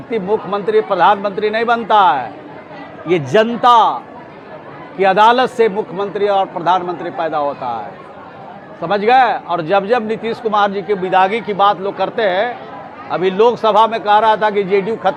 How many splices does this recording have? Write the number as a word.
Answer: zero